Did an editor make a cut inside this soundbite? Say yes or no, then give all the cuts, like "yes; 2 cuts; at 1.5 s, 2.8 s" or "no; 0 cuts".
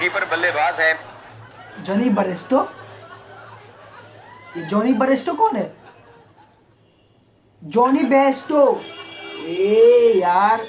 no; 0 cuts